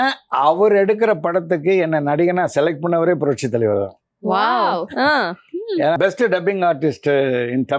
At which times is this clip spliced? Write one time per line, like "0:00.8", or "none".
0:06.0